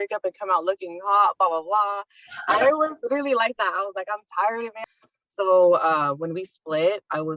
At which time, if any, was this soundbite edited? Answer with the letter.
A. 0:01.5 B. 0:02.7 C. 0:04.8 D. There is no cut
C